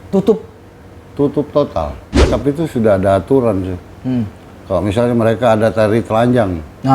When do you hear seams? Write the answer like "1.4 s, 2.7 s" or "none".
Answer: 2.3 s